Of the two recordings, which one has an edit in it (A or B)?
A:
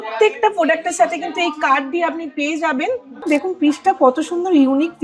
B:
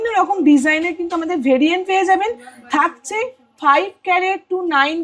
A